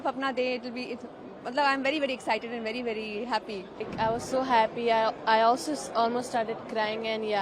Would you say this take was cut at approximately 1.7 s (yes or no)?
no